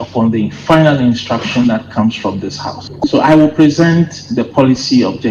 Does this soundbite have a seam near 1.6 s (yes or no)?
no